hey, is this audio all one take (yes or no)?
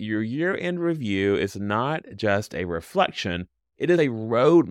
yes